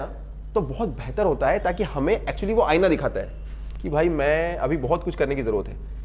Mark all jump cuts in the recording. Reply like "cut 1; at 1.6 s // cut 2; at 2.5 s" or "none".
none